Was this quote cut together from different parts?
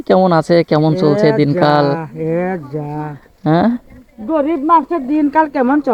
no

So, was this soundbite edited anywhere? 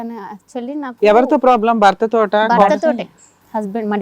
yes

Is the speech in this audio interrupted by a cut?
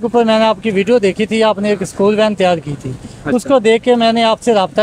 no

